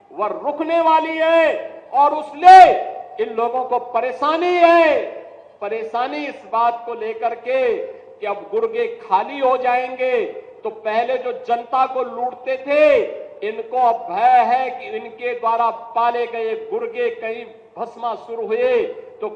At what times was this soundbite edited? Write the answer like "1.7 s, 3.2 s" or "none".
none